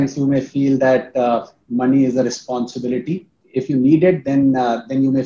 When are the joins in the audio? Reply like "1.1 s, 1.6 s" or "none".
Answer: 3.4 s